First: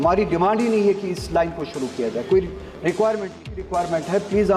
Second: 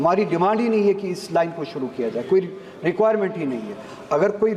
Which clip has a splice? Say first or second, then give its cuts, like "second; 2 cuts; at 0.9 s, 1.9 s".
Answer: first; 1 cut; at 3.7 s